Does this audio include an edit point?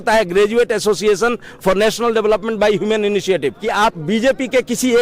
yes; 1 cut; at 3.6 s

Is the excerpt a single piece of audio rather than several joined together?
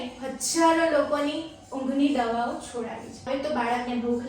no; 1 cut; at 3.2 s

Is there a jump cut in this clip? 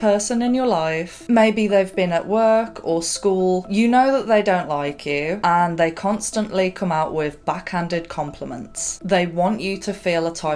yes; 2 cuts; at 5.4 s, 8.9 s

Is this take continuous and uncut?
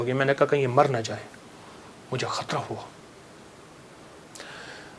yes; 0 cuts

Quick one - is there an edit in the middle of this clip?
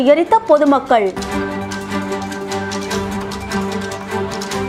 no; 0 cuts

